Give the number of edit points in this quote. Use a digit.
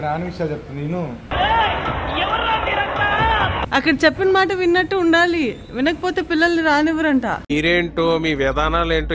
1